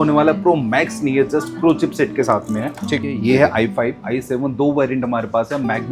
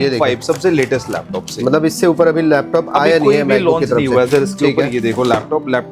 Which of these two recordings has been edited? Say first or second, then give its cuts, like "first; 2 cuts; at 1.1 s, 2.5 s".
first; 1 cut; at 3.0 s